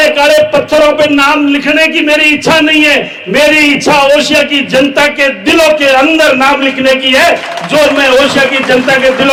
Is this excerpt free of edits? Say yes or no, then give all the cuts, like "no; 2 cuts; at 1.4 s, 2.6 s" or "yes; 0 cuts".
yes; 0 cuts